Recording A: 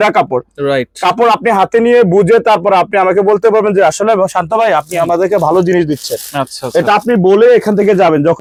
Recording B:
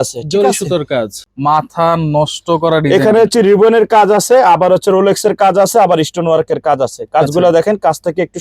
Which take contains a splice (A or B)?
B